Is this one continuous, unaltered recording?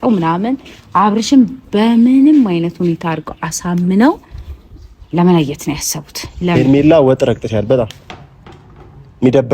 no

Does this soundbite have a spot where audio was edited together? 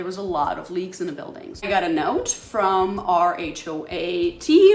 yes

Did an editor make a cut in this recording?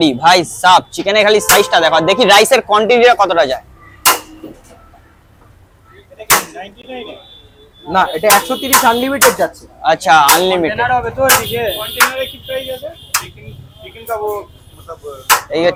no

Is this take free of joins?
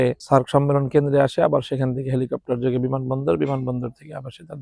yes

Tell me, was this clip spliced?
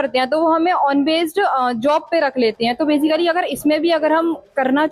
no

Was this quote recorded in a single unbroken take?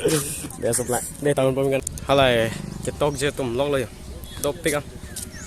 no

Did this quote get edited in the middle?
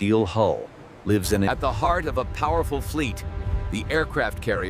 yes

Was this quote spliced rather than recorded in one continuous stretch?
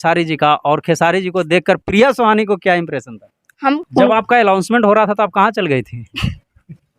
yes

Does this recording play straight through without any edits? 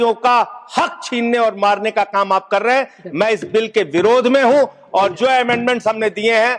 yes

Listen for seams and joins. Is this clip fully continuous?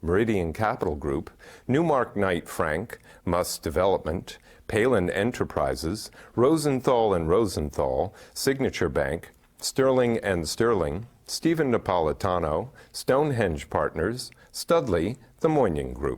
no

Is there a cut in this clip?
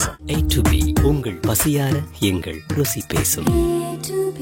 no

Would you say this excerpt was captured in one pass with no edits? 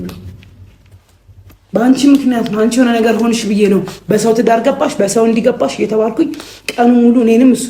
yes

